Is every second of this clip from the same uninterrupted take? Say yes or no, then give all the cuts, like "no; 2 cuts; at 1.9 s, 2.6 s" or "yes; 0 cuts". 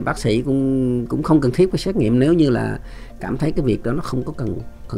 yes; 0 cuts